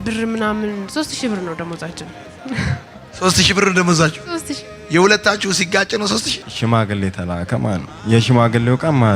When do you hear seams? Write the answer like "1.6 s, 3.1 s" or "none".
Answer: 6.4 s, 7.9 s